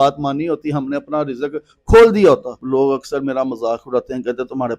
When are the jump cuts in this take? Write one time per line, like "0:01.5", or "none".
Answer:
0:02.6